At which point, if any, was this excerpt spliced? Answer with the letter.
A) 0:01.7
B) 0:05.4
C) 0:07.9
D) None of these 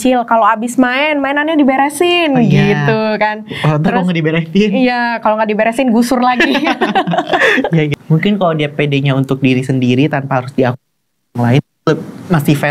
C